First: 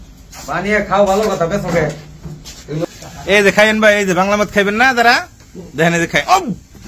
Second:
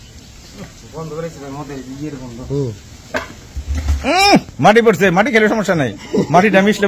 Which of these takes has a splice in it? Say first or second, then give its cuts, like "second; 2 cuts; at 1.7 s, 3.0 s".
first; 1 cut; at 2.9 s